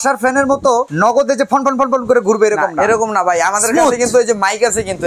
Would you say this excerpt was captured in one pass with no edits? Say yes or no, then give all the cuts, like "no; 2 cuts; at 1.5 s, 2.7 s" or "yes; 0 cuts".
no; 1 cut; at 0.9 s